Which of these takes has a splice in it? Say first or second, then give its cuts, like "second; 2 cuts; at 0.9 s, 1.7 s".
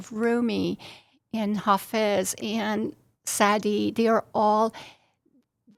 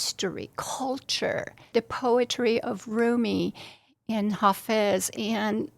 second; 1 cut; at 1.7 s